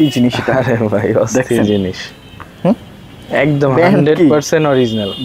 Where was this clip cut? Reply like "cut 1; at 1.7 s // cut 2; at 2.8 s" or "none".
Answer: none

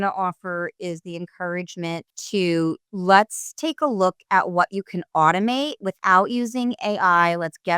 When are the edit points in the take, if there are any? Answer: cut 1; at 2.1 s

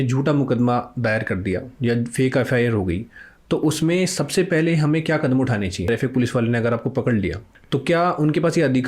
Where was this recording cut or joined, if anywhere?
cut 1; at 5.8 s // cut 2; at 7.5 s

